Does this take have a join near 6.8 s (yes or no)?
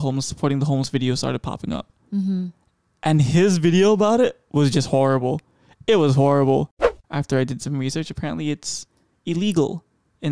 yes